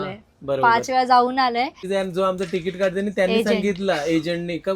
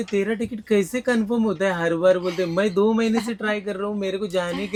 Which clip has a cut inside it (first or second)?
first